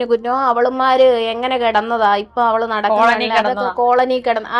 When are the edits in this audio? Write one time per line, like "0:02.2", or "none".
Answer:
none